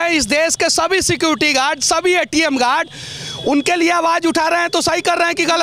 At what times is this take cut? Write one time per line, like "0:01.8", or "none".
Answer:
none